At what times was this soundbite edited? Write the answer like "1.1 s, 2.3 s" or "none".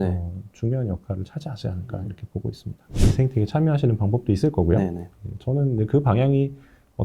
3.0 s

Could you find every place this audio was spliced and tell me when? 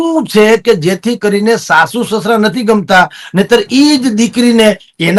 none

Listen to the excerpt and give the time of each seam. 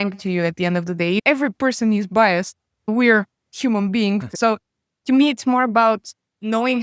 1.2 s, 4.3 s

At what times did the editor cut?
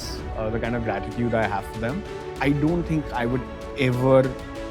2.3 s

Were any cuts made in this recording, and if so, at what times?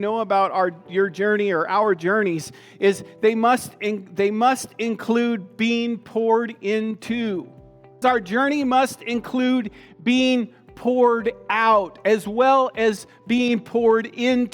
8.0 s

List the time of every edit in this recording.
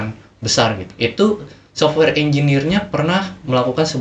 0.9 s

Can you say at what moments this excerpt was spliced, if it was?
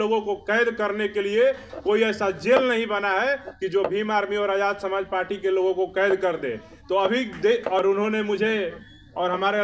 7.8 s

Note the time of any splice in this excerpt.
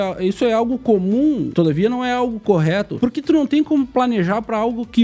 1.5 s, 2.9 s

